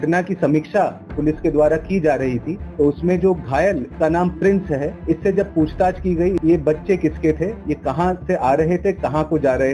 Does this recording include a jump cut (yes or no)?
yes